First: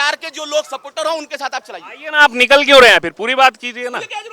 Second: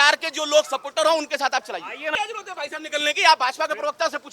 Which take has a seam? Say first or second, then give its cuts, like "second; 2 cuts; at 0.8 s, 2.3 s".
second; 1 cut; at 2.1 s